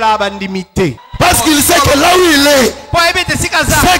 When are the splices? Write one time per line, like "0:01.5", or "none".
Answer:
0:01.0